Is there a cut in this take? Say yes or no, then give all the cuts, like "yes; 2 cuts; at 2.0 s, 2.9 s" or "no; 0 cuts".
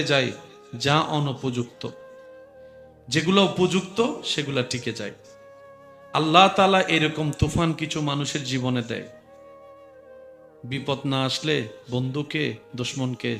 yes; 2 cuts; at 9.1 s, 10.6 s